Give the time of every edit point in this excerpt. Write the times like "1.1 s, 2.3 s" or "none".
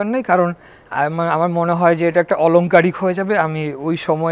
none